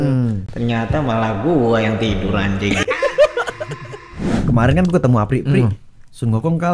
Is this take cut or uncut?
cut